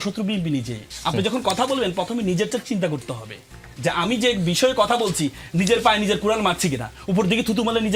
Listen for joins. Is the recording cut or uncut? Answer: uncut